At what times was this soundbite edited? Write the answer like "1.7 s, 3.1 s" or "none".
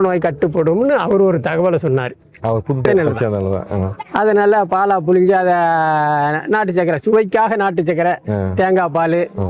2.8 s

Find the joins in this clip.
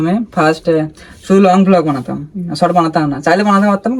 none

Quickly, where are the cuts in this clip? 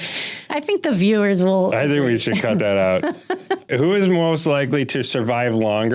3.6 s

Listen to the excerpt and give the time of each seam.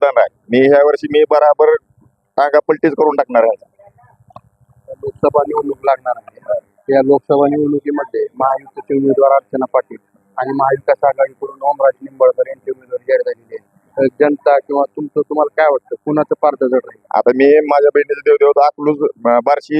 none

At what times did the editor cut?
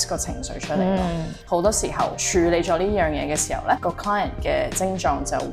2.2 s, 3.8 s

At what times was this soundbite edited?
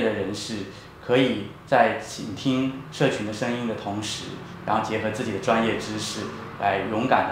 none

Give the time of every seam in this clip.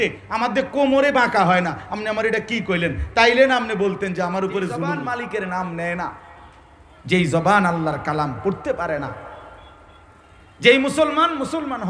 5.0 s

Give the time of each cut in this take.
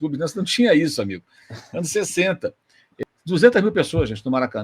2.8 s

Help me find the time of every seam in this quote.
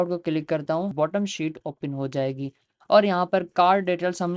0.9 s

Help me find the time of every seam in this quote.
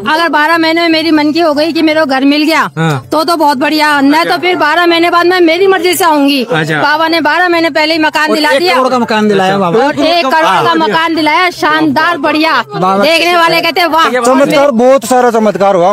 14.1 s

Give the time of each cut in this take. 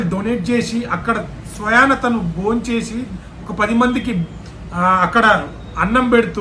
none

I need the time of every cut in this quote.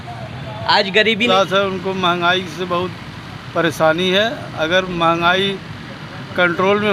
1.3 s

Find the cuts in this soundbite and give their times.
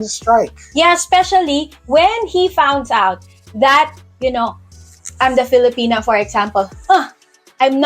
none

